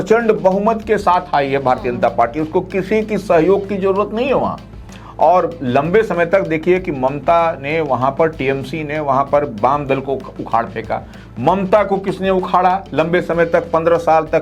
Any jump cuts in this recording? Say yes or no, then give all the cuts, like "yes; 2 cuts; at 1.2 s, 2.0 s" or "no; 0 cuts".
no; 0 cuts